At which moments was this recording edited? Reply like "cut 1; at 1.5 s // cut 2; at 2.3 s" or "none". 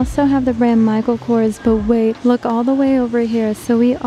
cut 1; at 2.2 s